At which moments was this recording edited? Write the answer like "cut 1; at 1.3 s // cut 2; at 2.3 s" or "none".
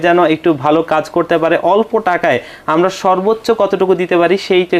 none

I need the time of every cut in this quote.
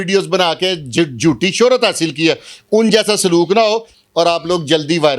cut 1; at 3.9 s

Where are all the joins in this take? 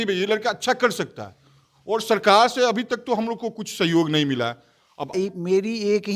cut 1; at 5.1 s

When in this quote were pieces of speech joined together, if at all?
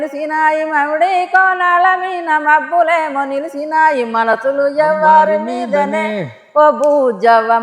none

